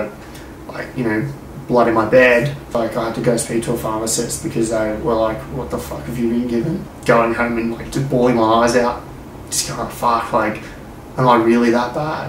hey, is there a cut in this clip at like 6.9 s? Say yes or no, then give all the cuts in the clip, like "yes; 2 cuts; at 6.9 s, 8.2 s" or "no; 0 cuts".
yes; 2 cuts; at 2.6 s, 6.9 s